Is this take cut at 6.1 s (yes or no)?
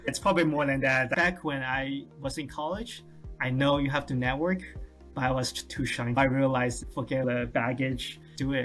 yes